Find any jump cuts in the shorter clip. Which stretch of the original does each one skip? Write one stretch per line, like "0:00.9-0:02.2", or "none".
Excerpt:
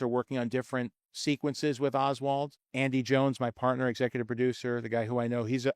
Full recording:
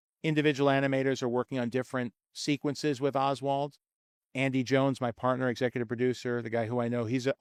0:03.8-0:04.2